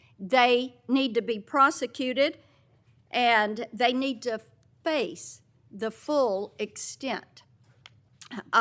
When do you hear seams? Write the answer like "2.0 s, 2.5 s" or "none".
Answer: none